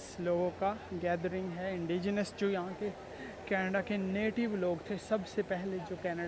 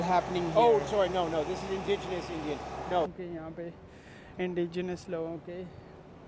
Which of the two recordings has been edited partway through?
second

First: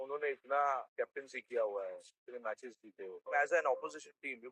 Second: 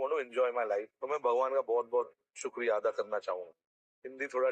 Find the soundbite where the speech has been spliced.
first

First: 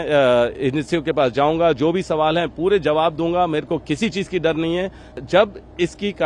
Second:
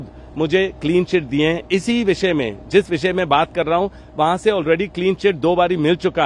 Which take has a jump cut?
first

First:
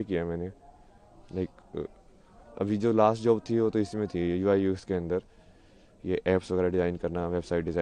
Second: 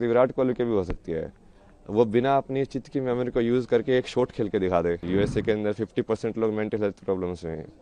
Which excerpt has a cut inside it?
second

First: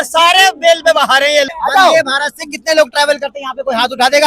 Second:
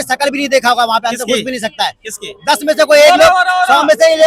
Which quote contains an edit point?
first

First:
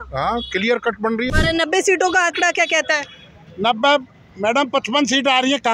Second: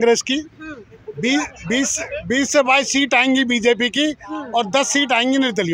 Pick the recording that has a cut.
first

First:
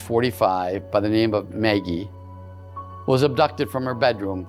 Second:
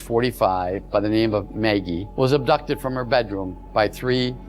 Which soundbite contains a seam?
second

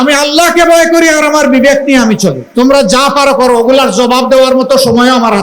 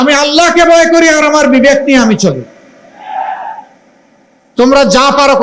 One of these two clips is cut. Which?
first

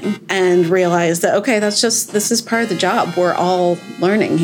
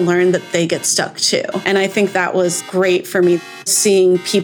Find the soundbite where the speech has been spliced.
second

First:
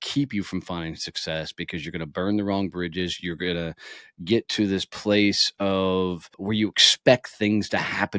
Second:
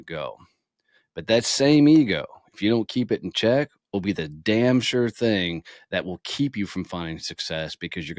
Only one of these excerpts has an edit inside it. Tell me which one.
first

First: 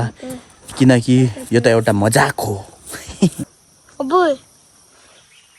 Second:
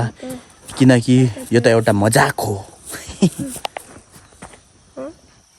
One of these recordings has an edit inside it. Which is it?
first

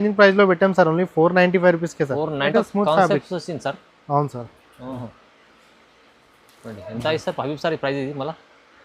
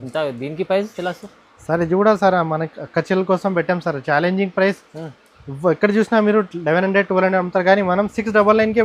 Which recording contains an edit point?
first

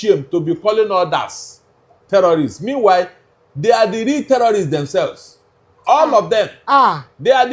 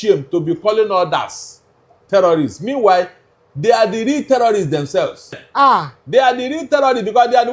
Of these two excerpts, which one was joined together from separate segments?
second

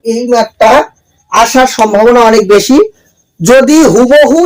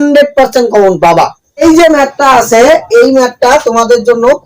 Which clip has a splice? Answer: second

